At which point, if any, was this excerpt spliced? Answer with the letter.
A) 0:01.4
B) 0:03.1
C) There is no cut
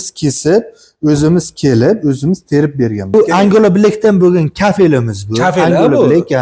B